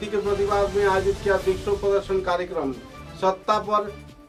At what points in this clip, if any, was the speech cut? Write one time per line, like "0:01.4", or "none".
none